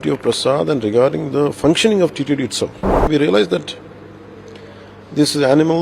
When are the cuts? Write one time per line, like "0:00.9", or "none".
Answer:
0:03.1

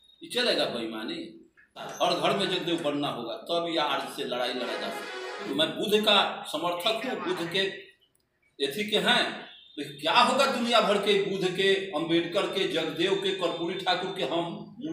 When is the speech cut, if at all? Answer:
0:01.8
0:05.5

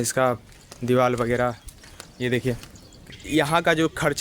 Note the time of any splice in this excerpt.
0:03.2

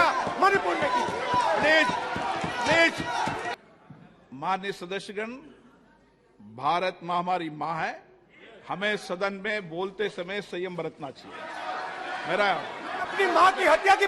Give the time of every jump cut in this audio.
0:03.5

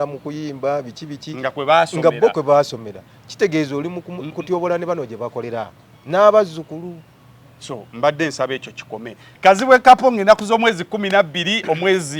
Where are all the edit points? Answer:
0:09.3

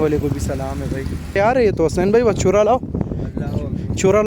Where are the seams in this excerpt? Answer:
0:01.4

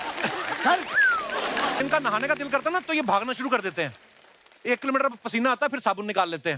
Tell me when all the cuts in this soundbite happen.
0:01.8

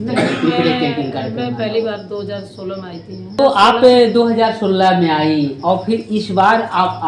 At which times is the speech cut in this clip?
0:03.4

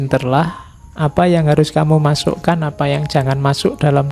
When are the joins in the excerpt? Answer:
none

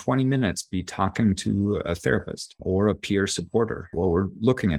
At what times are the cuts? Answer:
0:03.8

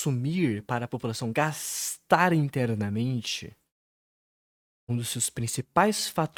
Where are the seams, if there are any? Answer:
none

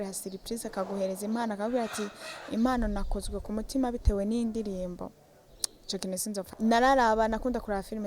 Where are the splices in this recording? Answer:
0:06.5

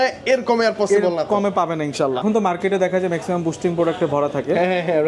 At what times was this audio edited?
0:02.2

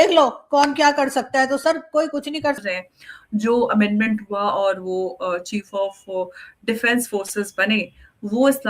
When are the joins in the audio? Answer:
0:02.6

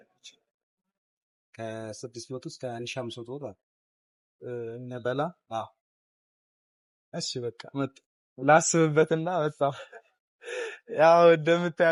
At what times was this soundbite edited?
none

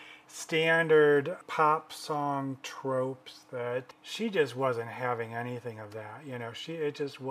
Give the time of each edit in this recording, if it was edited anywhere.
0:01.4
0:04.0

